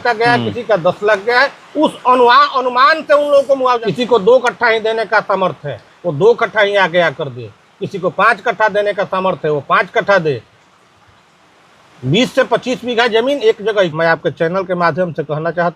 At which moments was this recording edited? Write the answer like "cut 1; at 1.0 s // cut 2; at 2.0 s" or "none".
cut 1; at 3.8 s // cut 2; at 13.9 s